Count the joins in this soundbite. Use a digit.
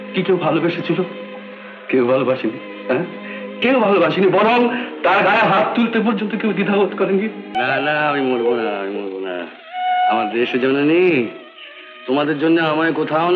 1